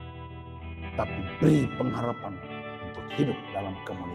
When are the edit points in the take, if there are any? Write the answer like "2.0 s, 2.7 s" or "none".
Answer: 1.0 s